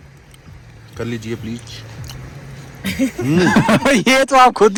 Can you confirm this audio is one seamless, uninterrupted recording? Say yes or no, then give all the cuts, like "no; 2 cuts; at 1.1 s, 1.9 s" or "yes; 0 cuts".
yes; 0 cuts